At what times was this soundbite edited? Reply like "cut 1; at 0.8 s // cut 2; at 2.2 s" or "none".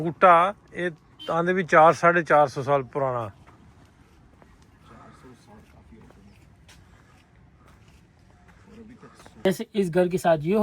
cut 1; at 9.5 s